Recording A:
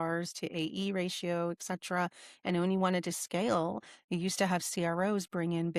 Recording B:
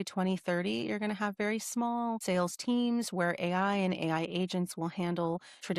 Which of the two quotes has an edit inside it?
B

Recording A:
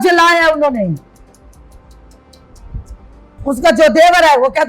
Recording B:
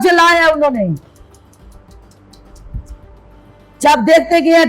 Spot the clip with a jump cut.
A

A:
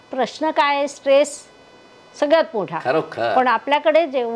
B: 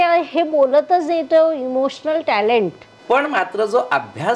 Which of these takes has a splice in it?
B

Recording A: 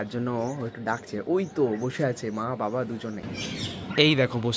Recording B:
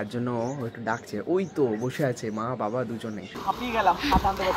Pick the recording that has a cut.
B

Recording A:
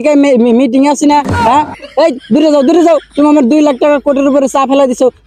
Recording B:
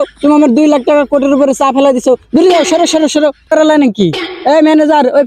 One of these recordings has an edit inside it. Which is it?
B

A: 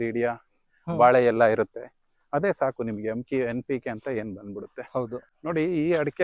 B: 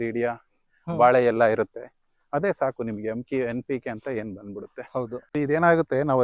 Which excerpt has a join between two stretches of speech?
B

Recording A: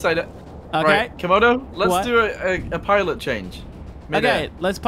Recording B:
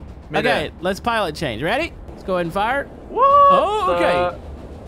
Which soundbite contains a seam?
B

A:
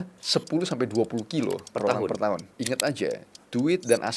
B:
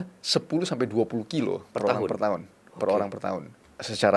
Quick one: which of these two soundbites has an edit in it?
A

